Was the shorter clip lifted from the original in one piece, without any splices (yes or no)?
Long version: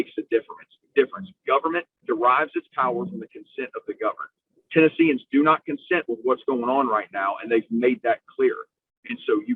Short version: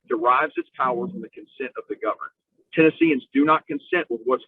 yes